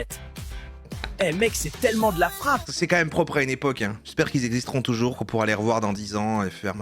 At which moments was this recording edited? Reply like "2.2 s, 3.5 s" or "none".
2.6 s